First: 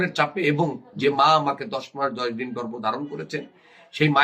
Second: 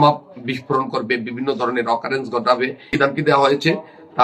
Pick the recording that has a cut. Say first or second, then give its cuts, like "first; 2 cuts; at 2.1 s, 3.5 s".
second; 1 cut; at 2.9 s